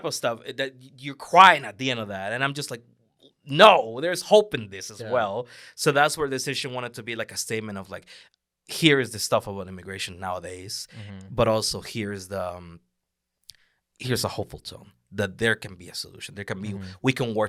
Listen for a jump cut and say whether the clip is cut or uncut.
uncut